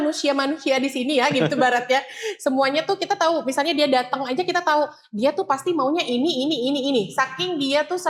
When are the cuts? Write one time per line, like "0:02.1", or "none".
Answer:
none